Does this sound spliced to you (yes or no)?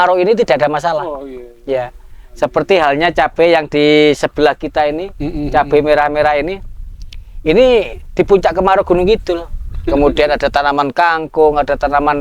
no